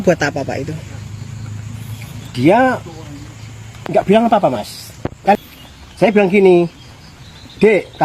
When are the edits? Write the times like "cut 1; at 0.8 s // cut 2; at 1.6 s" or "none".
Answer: cut 1; at 5.4 s